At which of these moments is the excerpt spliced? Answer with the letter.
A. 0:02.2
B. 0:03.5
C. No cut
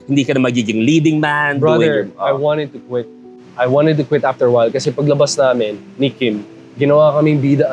C